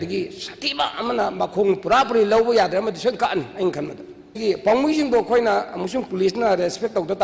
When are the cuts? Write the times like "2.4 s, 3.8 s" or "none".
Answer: 4.4 s

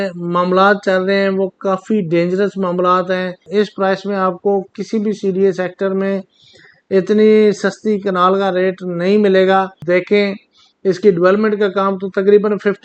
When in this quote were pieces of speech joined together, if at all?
3.4 s, 9.8 s

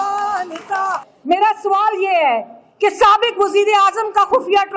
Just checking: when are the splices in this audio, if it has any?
1.1 s

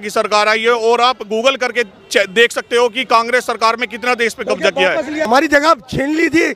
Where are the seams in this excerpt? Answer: 5.3 s

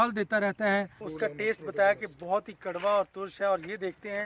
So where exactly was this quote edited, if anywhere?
1.1 s

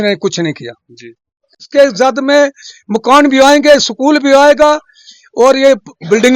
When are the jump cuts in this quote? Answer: 1.6 s

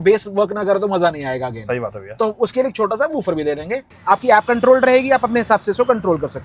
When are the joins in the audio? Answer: 3.9 s

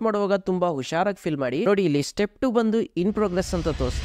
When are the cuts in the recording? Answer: 1.6 s

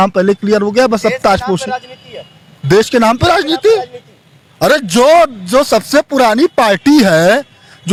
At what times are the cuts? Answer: none

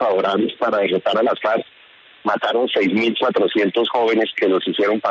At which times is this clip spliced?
none

